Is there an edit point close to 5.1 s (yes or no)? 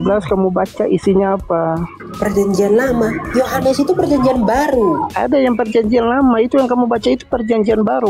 yes